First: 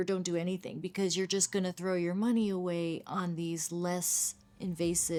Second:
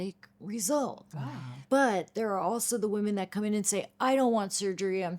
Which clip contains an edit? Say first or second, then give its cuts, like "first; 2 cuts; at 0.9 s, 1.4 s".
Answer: second; 1 cut; at 1.6 s